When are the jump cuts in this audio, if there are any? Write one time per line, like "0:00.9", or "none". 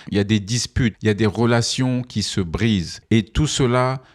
0:02.9